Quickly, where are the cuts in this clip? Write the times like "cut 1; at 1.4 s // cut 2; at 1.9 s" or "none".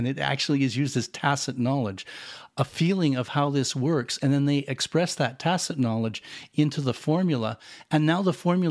none